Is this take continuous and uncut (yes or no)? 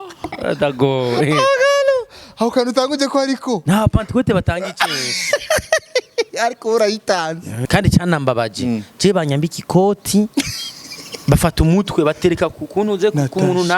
no